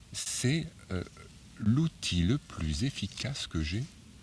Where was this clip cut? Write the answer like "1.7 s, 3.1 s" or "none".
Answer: none